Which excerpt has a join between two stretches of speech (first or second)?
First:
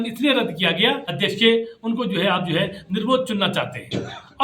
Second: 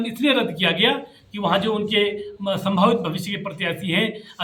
first